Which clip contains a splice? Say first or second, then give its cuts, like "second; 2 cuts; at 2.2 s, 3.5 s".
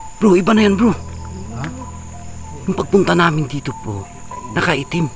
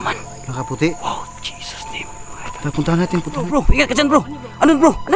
second; 1 cut; at 3.5 s